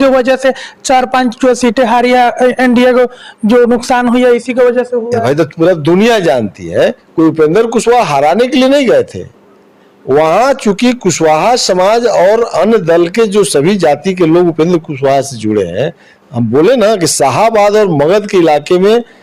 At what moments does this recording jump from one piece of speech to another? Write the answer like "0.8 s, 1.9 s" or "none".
none